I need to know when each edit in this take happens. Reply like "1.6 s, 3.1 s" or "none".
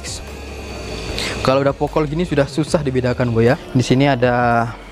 3.6 s